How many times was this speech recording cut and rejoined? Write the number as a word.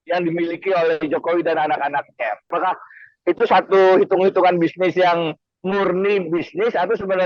one